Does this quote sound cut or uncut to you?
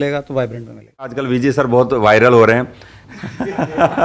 cut